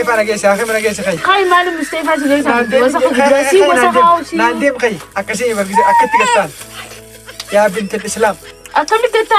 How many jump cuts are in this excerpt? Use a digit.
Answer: 1